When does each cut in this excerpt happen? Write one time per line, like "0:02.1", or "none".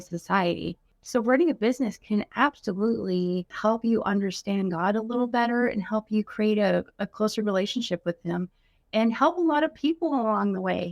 0:00.9
0:03.5